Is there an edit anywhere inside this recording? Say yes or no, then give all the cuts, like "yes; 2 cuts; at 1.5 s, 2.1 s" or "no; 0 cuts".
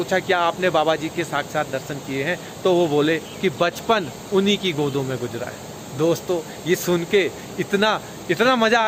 no; 0 cuts